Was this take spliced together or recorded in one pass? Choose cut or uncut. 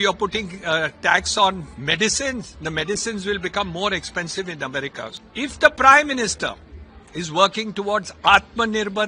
cut